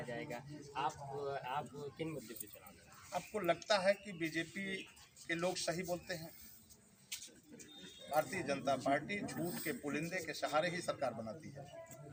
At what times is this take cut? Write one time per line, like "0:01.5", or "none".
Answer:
none